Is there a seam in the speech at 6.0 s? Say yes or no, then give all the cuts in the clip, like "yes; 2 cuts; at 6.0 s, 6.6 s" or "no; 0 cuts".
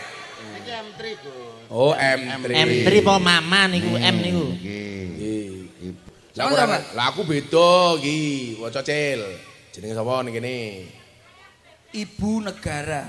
yes; 1 cut; at 6.0 s